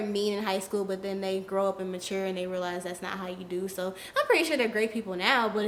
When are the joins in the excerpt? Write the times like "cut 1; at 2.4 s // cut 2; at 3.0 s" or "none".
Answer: none